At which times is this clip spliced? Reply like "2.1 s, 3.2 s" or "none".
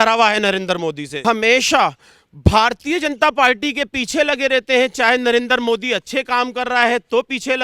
1.1 s